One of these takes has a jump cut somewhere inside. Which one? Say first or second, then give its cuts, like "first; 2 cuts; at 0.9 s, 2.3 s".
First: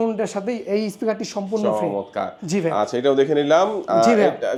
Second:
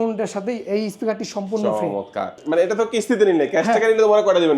second; 1 cut; at 2.4 s